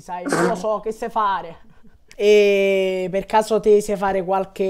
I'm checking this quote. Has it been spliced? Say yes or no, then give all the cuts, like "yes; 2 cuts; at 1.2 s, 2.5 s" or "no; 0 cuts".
yes; 1 cut; at 1.7 s